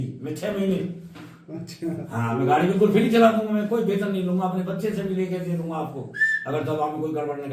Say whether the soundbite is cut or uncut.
uncut